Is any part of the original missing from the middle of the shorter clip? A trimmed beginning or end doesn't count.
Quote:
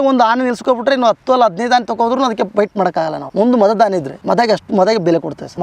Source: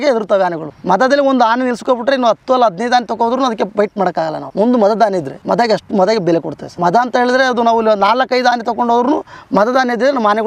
no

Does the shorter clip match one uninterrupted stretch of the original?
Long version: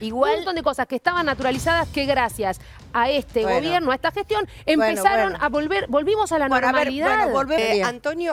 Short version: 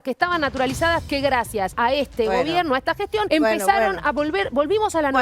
no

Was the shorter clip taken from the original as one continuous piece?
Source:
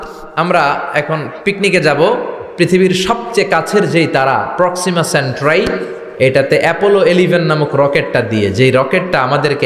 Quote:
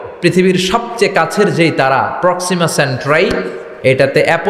yes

